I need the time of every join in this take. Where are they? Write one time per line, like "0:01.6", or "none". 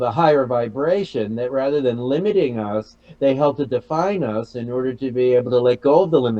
none